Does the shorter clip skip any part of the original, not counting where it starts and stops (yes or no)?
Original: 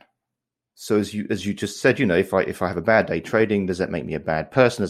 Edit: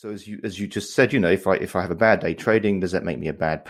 no